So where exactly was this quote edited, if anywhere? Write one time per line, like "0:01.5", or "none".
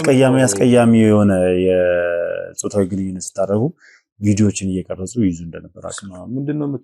none